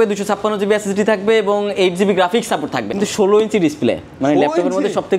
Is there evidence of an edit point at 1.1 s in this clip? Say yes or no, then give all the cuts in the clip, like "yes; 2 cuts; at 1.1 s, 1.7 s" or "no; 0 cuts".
no; 1 cut; at 2.9 s